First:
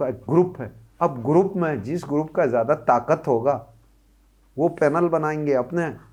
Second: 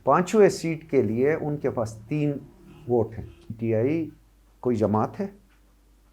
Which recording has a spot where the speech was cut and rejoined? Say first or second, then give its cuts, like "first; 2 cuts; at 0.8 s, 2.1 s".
second; 1 cut; at 3.6 s